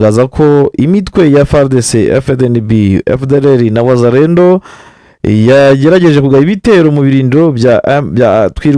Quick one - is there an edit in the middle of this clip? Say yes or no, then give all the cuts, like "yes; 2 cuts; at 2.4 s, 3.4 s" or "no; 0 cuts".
no; 0 cuts